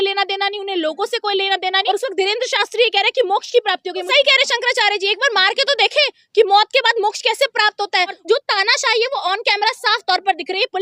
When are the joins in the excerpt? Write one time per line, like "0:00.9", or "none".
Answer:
0:01.8
0:04.1
0:08.2